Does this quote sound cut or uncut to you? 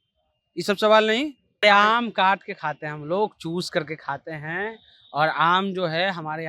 cut